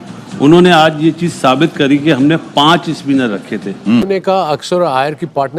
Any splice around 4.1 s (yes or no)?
yes